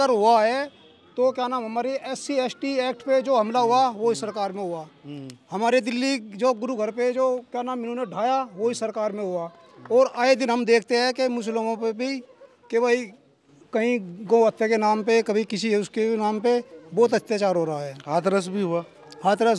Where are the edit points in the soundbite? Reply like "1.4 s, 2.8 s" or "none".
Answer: none